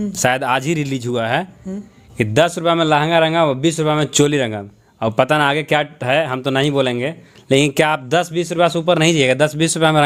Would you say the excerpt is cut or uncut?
uncut